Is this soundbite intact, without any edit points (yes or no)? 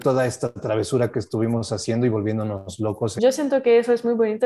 no